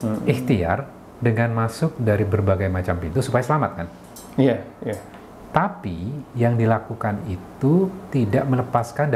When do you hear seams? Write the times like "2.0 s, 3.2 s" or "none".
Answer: none